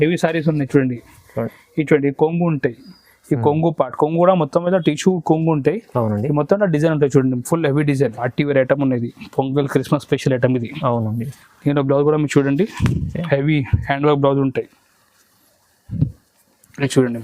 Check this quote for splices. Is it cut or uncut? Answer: cut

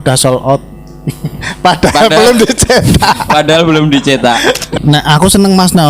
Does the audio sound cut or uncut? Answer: cut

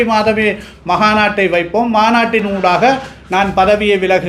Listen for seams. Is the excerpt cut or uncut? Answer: uncut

